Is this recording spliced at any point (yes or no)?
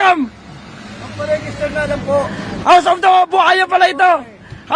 yes